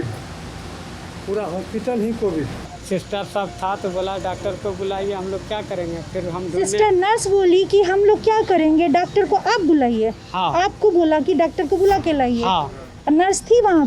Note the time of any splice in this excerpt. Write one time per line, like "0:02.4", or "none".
0:02.6